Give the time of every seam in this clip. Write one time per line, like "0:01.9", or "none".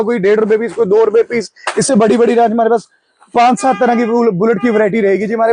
none